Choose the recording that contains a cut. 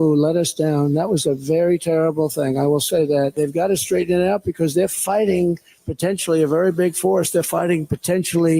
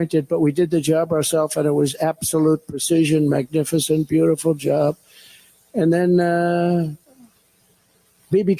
first; 1 cut; at 3.3 s

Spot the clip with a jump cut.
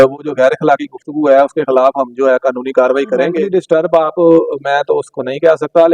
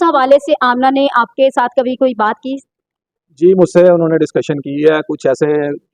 first; 1 cut; at 3.4 s

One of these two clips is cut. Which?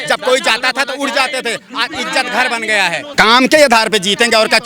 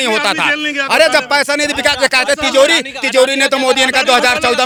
first; 1 cut; at 3.1 s

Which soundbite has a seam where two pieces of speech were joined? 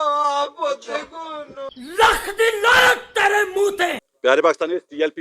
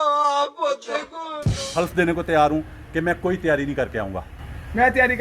second; 1 cut; at 1.6 s

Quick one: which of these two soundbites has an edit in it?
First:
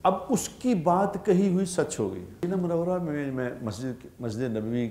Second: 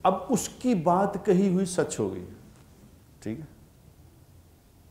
first; 1 cut; at 2.4 s

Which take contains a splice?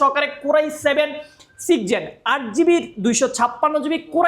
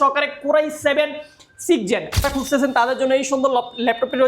second; 1 cut; at 2.2 s

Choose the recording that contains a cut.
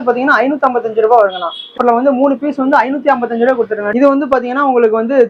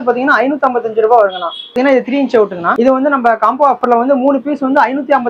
first; 2 cuts; at 1.7 s, 3.9 s

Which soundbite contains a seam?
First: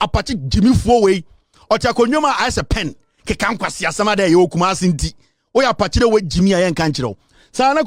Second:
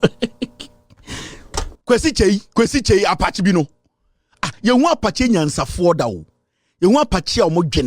second; 1 cut; at 1.7 s

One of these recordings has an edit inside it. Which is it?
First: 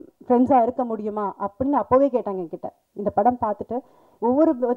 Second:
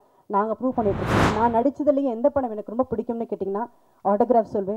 second; 1 cut; at 1.2 s

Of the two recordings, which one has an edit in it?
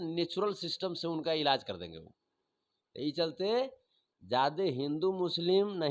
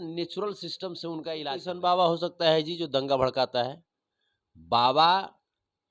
second; 1 cut; at 1.6 s

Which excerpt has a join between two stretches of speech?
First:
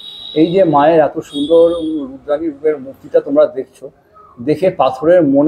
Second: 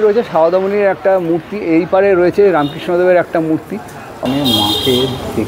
second; 1 cut; at 4.1 s

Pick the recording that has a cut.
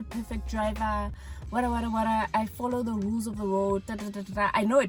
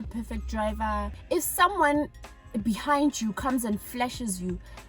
second; 1 cut; at 1.2 s

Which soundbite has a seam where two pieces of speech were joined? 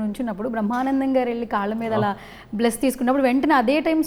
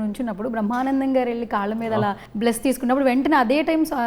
second; 1 cut; at 2.3 s

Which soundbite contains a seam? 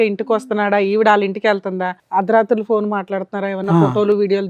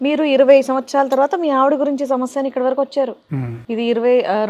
first; 1 cut; at 1.9 s

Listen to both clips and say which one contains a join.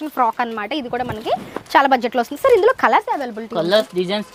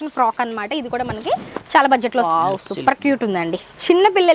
second; 1 cut; at 2.3 s

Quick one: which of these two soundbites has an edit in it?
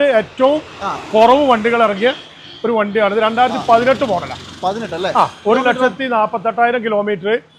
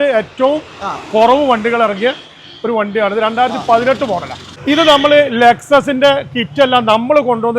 second; 1 cut; at 4.5 s

